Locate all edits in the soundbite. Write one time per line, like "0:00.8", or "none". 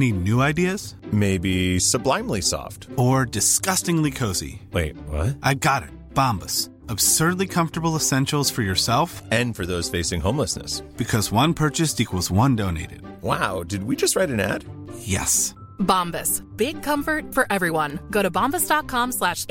none